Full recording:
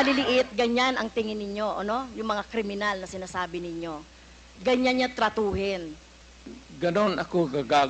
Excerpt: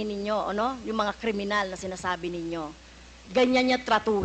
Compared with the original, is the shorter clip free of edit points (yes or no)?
yes